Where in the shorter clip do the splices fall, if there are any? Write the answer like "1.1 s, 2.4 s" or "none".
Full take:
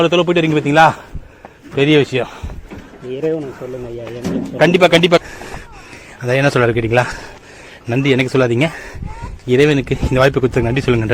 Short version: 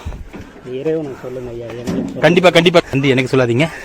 2.9 s